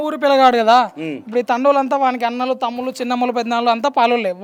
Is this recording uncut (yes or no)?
yes